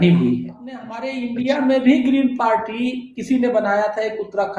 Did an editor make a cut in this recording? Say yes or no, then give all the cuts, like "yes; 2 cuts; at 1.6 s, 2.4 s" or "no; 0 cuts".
yes; 1 cut; at 1.1 s